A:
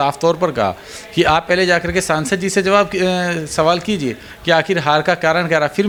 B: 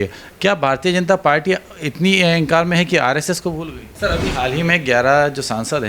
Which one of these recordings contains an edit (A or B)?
B